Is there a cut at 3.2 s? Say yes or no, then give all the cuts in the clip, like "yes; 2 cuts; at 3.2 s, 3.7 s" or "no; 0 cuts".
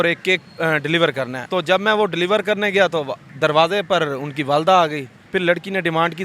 yes; 3 cuts; at 1.4 s, 3.2 s, 5.1 s